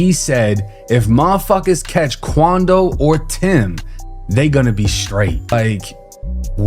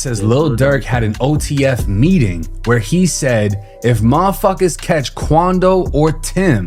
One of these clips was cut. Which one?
first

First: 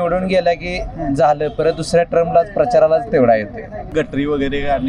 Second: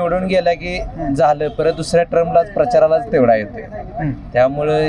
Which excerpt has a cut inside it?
first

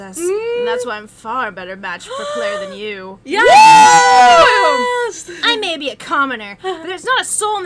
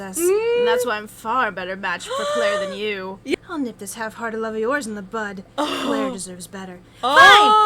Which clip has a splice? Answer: second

